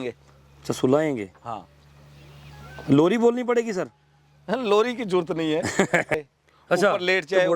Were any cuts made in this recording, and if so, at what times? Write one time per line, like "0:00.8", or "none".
0:06.2